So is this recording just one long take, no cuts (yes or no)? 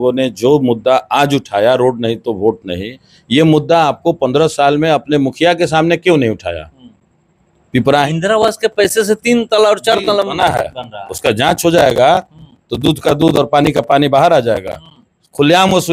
no